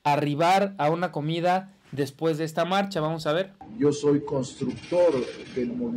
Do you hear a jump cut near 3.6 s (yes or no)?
yes